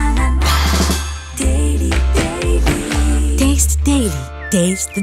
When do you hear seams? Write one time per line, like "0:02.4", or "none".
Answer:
none